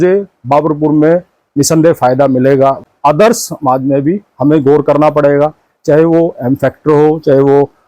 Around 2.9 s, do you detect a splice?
yes; 1 cut; at 2.9 s

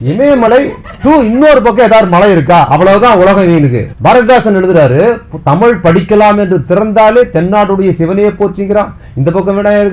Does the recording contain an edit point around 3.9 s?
yes; 1 cut; at 3.9 s

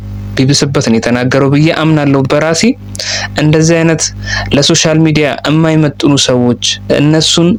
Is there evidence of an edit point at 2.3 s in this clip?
no; 0 cuts

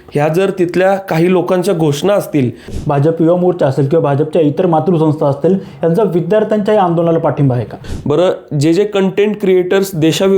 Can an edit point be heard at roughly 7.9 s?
yes; 2 cuts; at 2.8 s, 7.9 s

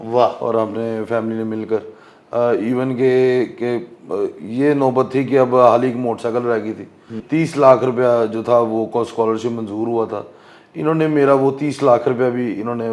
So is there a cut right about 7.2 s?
yes; 1 cut; at 7.2 s

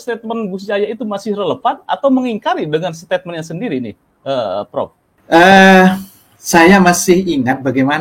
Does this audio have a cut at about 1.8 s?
no; 1 cut; at 5.1 s

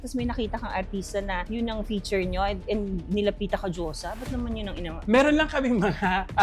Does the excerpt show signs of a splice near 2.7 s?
no; 1 cut; at 4.9 s

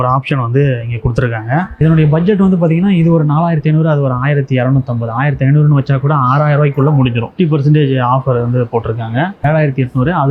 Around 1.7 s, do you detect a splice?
yes; 3 cuts; at 1.7 s, 7.3 s, 9.4 s

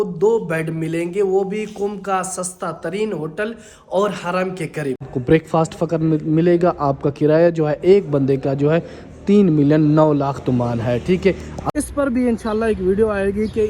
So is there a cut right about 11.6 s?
yes; 2 cuts; at 5.1 s, 11.6 s

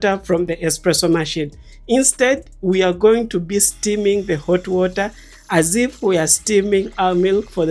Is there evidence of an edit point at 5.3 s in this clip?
no; 0 cuts

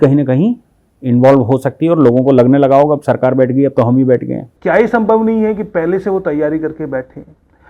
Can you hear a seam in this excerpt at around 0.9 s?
no; 1 cut; at 4.5 s

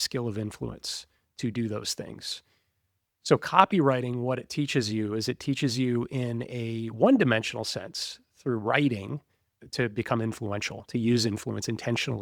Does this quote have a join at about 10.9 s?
no; 1 cut; at 9.5 s

